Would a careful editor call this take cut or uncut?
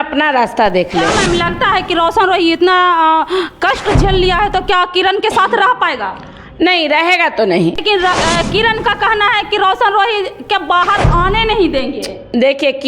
cut